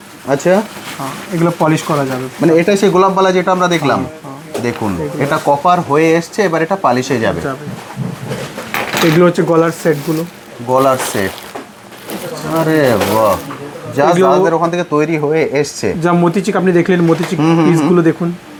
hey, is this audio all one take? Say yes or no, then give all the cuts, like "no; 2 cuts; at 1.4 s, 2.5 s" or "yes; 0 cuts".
yes; 0 cuts